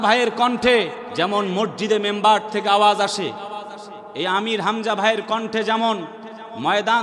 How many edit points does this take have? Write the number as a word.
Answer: one